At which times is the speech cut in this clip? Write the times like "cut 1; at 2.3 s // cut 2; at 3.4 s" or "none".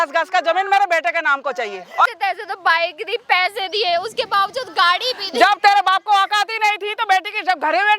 cut 1; at 2.1 s